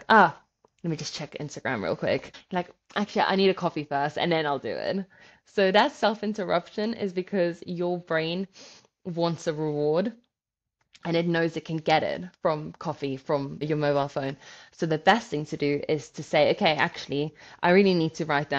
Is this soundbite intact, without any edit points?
no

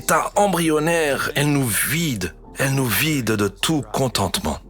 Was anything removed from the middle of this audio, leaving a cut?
yes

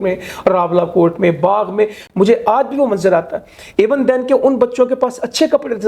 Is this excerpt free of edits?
yes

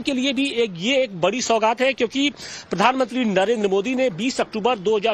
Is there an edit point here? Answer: yes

